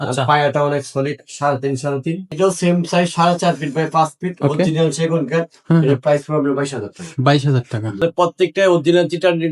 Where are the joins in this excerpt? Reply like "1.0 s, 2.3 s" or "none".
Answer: 2.3 s, 8.0 s